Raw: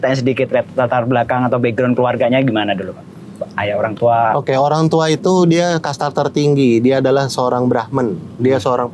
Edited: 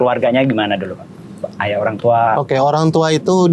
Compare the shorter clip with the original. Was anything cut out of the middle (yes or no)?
no